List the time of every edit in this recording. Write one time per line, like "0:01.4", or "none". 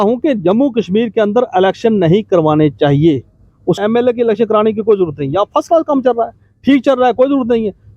0:03.8